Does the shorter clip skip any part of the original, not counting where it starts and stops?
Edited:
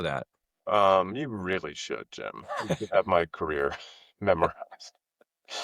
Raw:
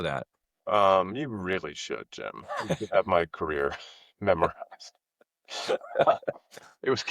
no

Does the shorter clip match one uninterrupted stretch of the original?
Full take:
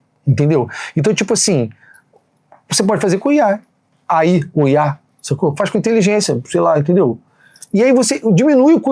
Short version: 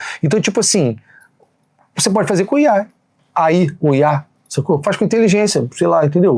yes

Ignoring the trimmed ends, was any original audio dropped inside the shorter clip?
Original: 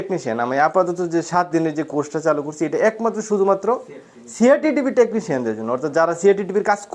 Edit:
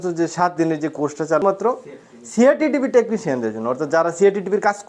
yes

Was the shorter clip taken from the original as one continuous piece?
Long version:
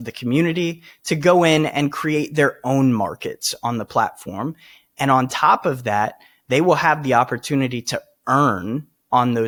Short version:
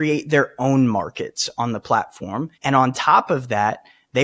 no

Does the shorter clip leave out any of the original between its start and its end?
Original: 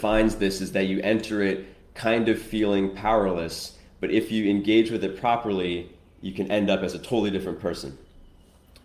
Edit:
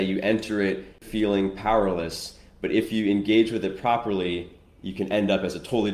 yes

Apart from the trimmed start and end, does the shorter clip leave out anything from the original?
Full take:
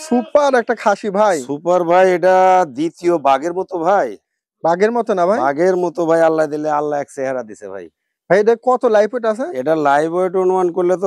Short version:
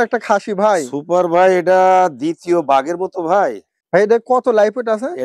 yes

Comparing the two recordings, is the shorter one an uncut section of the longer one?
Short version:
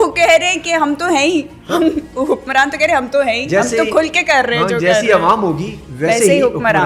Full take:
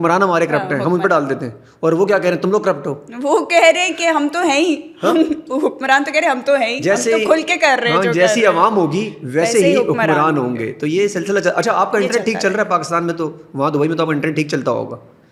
yes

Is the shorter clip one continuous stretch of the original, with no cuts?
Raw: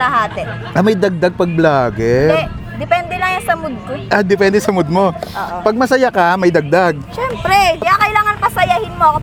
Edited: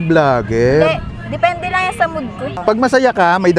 no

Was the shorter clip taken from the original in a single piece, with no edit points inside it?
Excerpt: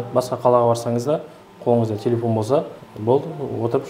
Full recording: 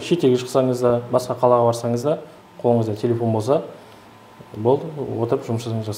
no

